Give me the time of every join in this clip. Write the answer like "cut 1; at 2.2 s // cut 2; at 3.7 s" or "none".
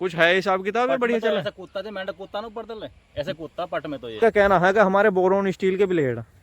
cut 1; at 4.2 s